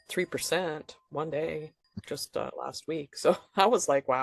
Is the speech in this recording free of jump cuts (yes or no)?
yes